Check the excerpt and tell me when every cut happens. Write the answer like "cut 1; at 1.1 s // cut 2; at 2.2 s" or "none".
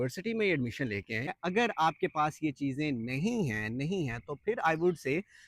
cut 1; at 1.3 s